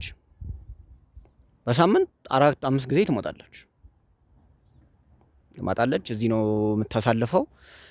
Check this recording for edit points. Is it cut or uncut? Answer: uncut